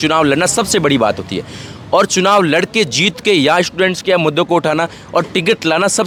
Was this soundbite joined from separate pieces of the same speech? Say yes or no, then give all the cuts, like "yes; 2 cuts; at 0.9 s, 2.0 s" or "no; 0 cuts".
no; 0 cuts